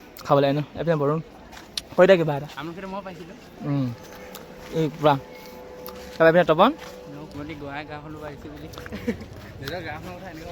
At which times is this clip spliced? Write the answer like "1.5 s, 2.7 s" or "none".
7.3 s, 9.3 s